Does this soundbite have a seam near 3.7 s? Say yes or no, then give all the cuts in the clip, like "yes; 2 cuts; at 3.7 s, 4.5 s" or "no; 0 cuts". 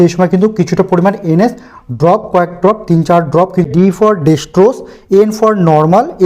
yes; 1 cut; at 3.7 s